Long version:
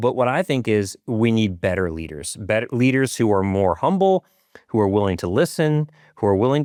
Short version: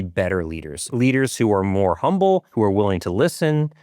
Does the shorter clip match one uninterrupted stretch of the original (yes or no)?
no